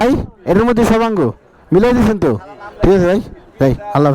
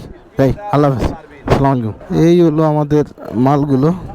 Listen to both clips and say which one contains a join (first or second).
second